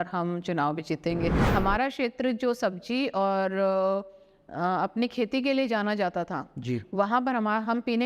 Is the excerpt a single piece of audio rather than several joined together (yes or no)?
no